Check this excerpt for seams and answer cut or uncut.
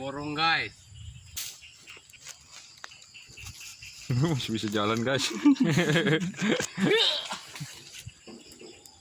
cut